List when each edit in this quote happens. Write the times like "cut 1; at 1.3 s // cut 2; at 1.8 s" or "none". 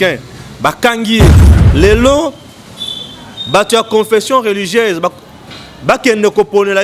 cut 1; at 1.5 s

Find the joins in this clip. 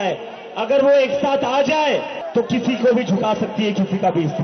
cut 1; at 2.2 s

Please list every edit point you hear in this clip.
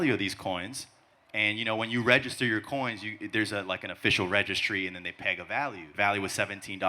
cut 1; at 5.8 s

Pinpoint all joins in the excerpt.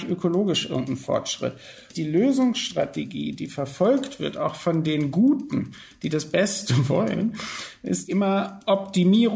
cut 1; at 1.9 s // cut 2; at 8.0 s

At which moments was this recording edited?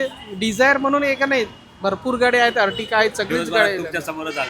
none

